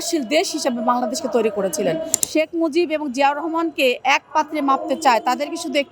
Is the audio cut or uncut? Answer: cut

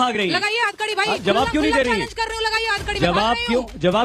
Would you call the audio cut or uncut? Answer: uncut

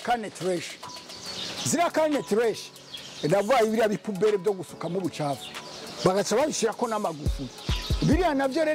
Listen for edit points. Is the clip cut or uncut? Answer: uncut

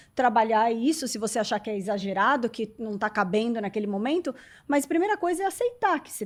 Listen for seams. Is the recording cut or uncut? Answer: uncut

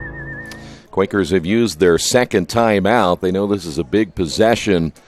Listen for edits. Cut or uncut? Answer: uncut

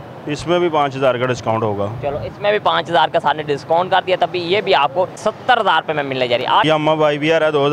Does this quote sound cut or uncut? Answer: cut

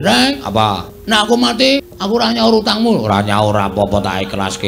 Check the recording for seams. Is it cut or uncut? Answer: cut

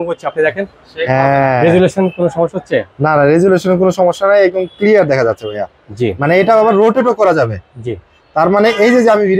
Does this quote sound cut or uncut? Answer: uncut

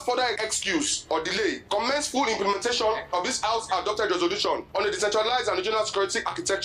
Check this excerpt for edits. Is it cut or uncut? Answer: uncut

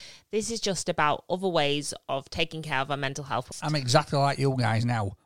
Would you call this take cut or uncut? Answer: cut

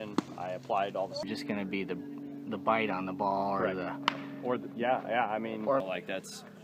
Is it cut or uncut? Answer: cut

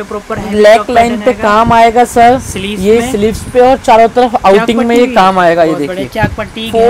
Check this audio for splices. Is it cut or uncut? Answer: uncut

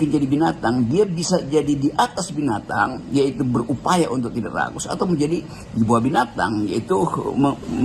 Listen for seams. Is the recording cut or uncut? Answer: uncut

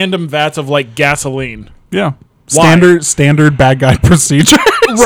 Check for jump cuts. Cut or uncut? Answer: uncut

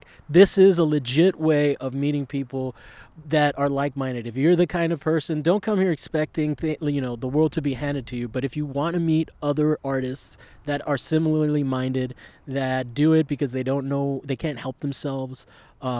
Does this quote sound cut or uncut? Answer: uncut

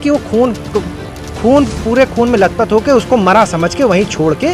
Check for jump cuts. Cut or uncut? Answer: uncut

